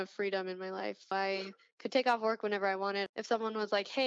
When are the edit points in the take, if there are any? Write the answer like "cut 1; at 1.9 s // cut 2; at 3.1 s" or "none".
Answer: cut 1; at 1.1 s // cut 2; at 3.1 s